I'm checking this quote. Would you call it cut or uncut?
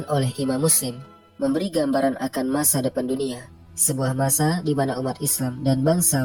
uncut